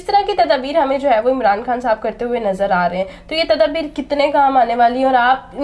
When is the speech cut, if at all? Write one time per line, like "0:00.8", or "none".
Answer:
none